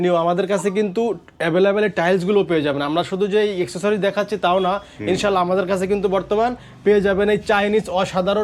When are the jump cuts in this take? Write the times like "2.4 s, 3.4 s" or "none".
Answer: none